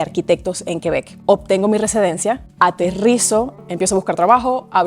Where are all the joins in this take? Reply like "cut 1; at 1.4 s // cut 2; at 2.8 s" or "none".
cut 1; at 1.2 s // cut 2; at 2.5 s // cut 3; at 3.5 s